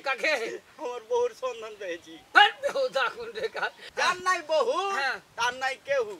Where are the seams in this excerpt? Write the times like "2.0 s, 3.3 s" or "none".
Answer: 3.8 s

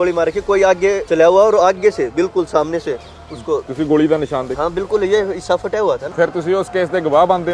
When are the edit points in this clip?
1.0 s, 6.1 s

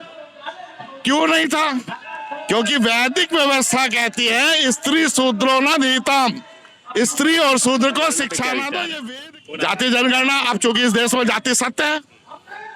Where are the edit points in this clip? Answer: 8.9 s

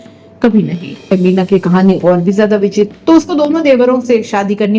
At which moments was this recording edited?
1.1 s, 2.9 s

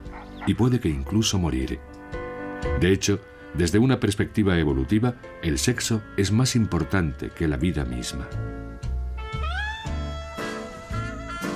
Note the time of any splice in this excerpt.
none

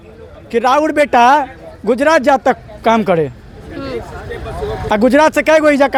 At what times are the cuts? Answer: none

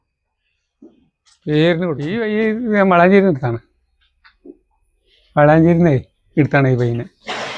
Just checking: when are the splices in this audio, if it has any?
2.3 s

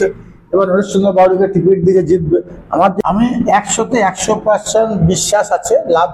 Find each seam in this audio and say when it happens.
2.9 s

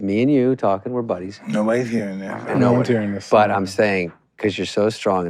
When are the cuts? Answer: none

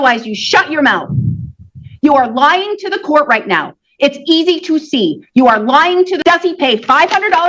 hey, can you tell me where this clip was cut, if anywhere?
6.2 s

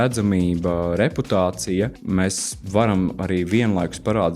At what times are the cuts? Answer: 2.0 s

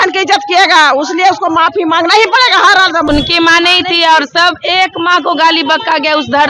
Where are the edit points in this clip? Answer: 3.1 s

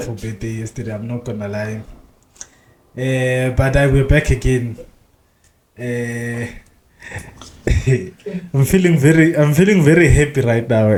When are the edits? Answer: none

